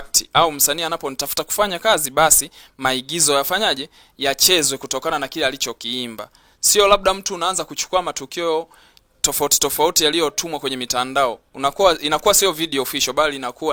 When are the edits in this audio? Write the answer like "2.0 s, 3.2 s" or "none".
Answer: none